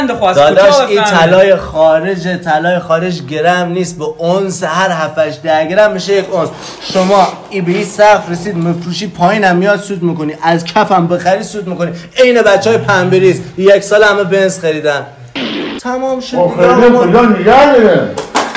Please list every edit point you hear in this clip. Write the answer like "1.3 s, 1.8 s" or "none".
none